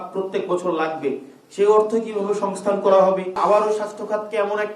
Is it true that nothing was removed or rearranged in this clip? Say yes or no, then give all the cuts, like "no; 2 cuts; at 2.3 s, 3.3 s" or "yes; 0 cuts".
no; 1 cut; at 3.4 s